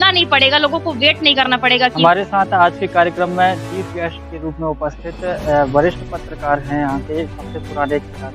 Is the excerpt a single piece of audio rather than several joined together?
no; 1 cut; at 2.0 s

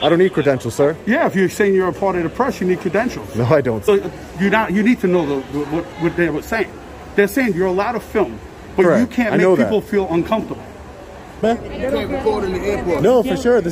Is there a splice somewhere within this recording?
yes; 2 cuts; at 3.8 s, 11.4 s

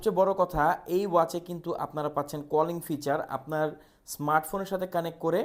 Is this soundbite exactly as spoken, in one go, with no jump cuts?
yes; 0 cuts

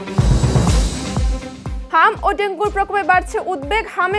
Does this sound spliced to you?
yes; 1 cut; at 1.7 s

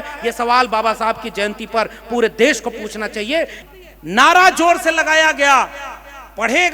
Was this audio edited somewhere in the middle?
yes; 1 cut; at 3.6 s

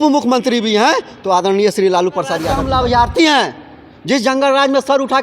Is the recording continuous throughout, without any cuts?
no; 1 cut; at 2.5 s

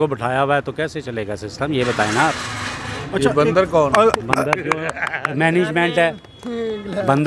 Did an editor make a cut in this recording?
no; 0 cuts

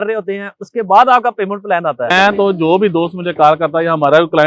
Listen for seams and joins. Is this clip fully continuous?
no; 1 cut; at 2.1 s

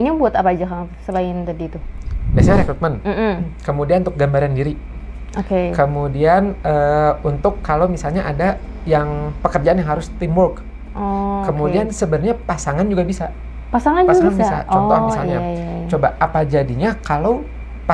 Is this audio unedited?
yes; 0 cuts

